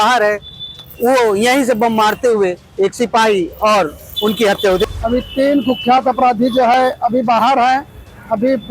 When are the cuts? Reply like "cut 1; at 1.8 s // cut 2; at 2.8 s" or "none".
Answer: cut 1; at 4.9 s

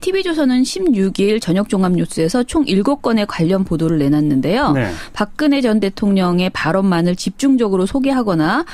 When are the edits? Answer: cut 1; at 7.2 s

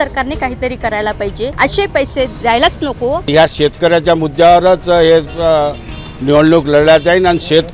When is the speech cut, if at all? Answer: cut 1; at 1.5 s // cut 2; at 3.3 s

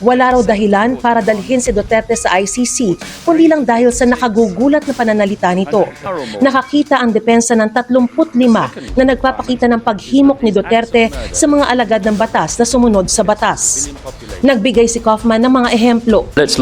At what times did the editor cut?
cut 1; at 6.2 s

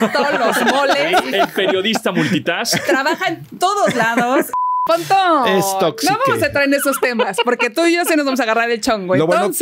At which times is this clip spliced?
cut 1; at 4.7 s

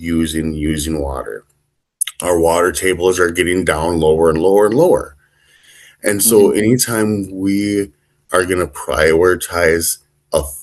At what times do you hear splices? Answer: none

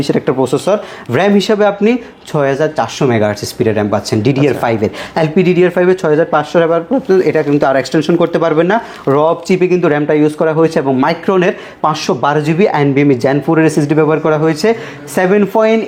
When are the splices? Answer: none

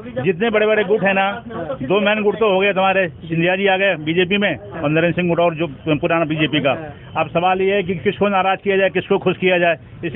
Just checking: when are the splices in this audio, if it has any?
none

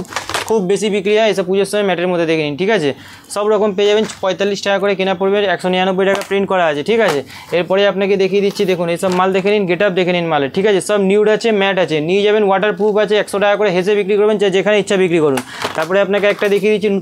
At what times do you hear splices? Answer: none

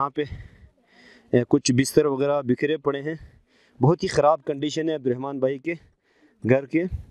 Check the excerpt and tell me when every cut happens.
none

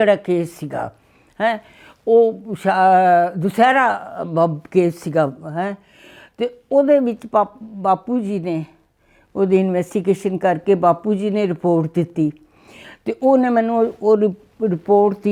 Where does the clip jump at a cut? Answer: none

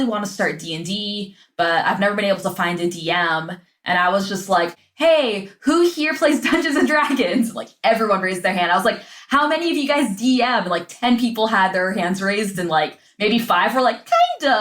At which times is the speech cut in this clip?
cut 1; at 4.7 s

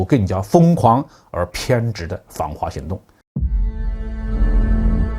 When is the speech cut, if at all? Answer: cut 1; at 3.2 s

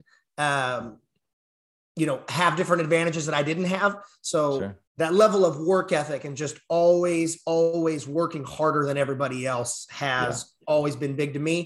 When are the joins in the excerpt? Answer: cut 1; at 4.8 s

